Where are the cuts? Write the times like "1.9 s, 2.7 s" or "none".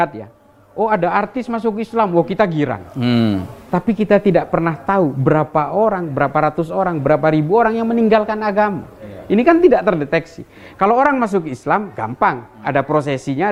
none